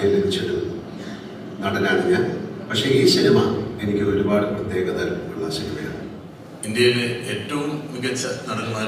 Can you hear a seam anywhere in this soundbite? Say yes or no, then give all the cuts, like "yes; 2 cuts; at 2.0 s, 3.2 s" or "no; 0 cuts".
yes; 1 cut; at 6.3 s